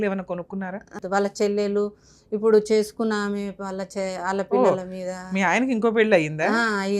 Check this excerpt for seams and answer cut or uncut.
cut